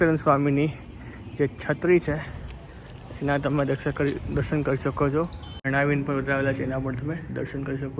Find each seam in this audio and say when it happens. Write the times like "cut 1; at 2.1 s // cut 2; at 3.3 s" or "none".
cut 1; at 5.7 s